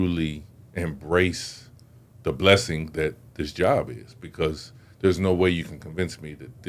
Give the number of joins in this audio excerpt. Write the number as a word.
zero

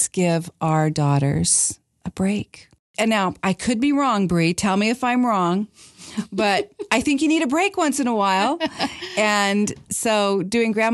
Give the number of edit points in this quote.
one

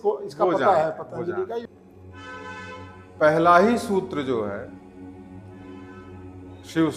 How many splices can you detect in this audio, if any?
one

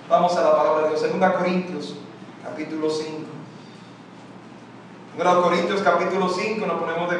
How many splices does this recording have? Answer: zero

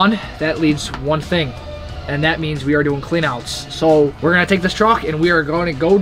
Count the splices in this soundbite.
zero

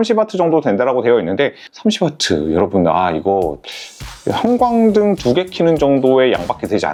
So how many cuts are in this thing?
zero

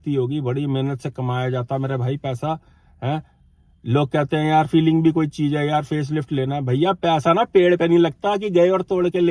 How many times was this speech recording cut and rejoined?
zero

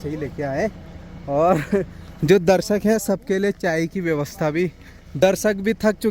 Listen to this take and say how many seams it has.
one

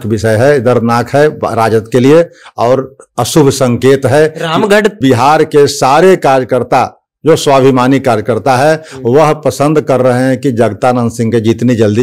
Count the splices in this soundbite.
one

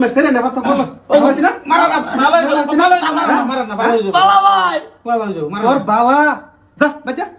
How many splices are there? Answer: zero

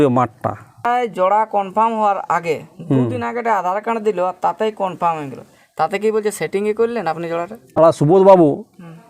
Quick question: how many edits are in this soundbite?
two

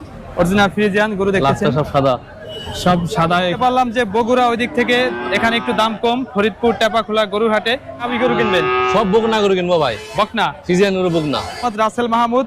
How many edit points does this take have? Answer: three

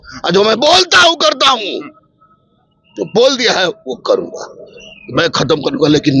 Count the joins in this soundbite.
zero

